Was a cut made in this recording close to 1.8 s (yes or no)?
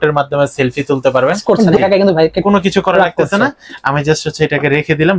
yes